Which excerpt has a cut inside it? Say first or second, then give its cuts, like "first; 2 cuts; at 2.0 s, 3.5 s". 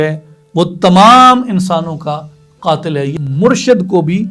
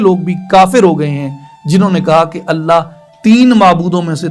first; 1 cut; at 3.1 s